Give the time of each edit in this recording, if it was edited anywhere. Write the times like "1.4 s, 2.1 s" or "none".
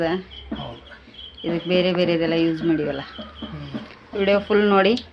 none